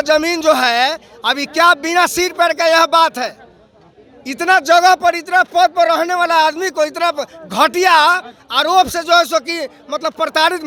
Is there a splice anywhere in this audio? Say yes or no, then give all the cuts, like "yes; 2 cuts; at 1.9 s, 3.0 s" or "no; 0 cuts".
no; 0 cuts